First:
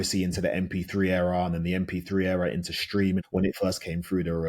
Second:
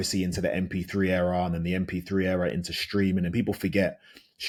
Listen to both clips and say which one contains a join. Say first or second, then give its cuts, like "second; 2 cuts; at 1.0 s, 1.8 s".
first; 1 cut; at 3.2 s